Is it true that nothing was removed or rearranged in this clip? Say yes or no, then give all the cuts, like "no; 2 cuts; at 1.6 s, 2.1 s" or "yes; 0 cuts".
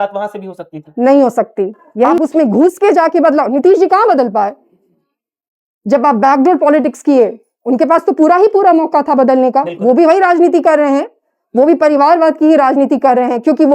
no; 1 cut; at 2.1 s